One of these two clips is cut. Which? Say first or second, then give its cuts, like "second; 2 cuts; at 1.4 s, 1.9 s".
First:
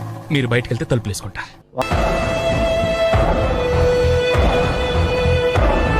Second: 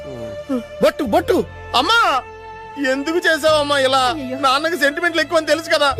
first; 1 cut; at 1.8 s